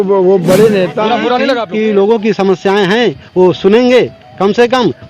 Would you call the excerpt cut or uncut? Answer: cut